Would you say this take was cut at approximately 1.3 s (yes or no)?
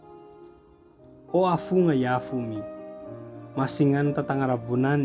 yes